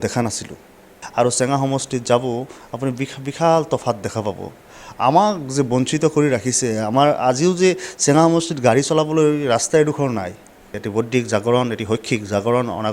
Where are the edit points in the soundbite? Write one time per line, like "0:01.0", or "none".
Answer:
0:01.0
0:10.8

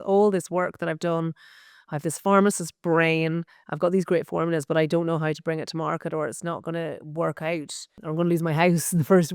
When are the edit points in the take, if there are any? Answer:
0:08.0

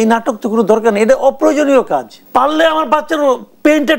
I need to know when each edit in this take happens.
0:02.2

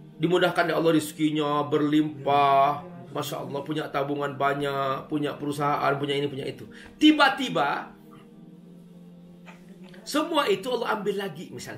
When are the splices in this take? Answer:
0:08.1
0:09.9

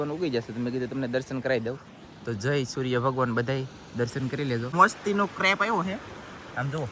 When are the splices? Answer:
0:04.7

